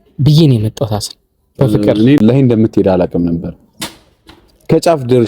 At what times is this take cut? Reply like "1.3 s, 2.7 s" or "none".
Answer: 2.2 s